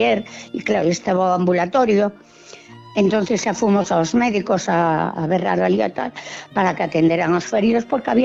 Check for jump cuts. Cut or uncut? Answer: uncut